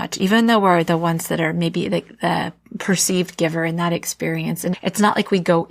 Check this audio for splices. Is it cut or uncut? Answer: uncut